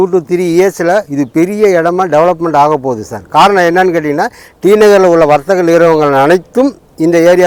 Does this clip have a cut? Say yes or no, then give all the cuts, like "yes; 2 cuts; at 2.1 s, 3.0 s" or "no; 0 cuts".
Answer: no; 0 cuts